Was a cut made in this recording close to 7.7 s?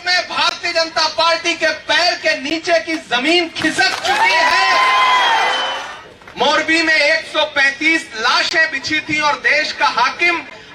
no; 1 cut; at 5.7 s

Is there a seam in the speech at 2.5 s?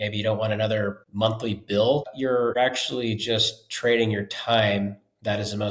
yes; 2 cuts; at 1.0 s, 2.5 s

